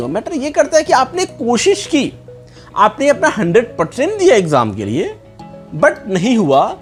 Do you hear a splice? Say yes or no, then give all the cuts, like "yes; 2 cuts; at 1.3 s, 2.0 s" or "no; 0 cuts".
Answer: no; 0 cuts